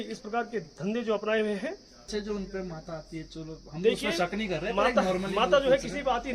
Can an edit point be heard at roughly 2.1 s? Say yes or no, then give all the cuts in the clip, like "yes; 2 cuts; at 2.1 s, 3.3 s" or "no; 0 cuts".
yes; 1 cut; at 2.1 s